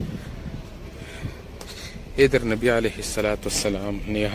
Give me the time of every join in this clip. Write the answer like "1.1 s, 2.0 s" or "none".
none